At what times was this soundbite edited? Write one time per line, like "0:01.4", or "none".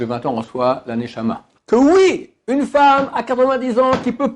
0:01.5

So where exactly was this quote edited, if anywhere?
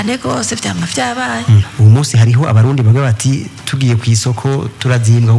0:01.7

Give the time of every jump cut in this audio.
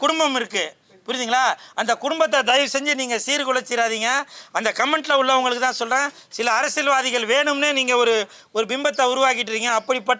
none

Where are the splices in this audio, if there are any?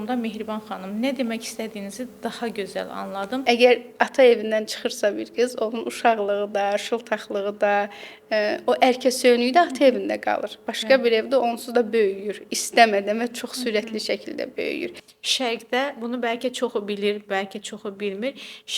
0:03.4
0:15.0

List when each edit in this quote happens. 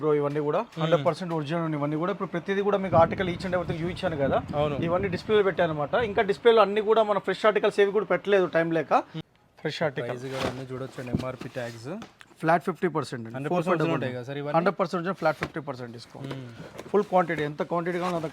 0:09.2

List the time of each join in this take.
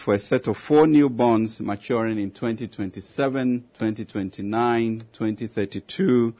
0:03.7

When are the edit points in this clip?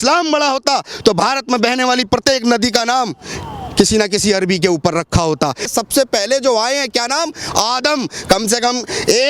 0:05.7

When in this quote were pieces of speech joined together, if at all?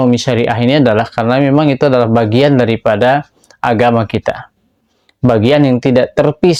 none

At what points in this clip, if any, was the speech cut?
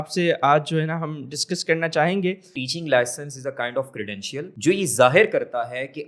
0:02.6
0:04.5

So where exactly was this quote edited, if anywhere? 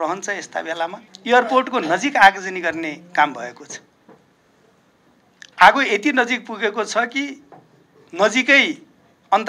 0:01.1

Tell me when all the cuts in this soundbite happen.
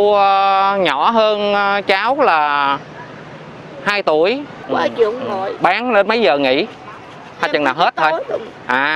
0:04.6

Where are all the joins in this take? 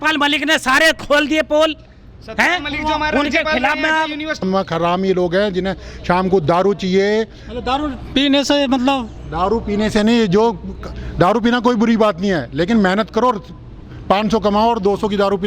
0:04.4

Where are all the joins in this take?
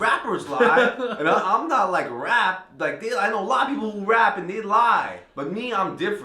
none

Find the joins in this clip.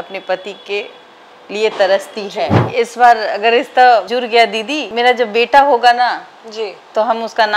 0:02.6

